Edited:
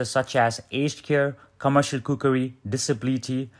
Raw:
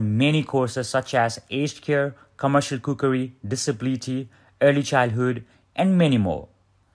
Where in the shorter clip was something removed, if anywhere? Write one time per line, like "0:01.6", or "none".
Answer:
none